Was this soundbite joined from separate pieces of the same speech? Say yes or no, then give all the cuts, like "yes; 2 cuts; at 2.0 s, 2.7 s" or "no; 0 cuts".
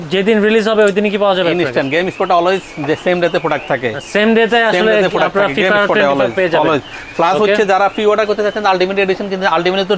no; 0 cuts